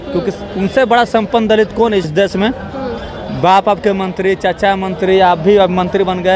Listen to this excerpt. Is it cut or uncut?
cut